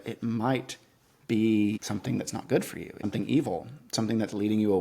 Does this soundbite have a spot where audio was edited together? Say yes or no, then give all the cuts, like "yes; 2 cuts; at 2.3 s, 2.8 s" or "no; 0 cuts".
yes; 2 cuts; at 1.8 s, 3.0 s